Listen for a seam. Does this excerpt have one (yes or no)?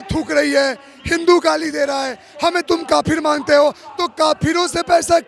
no